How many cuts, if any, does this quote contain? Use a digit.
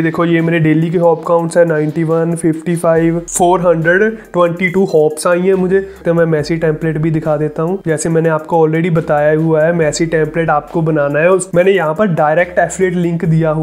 3